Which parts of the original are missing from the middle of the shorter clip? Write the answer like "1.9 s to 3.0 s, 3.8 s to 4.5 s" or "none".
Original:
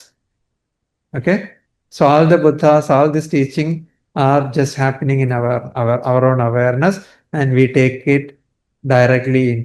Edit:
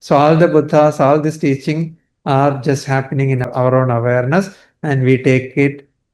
5.4 s to 6.0 s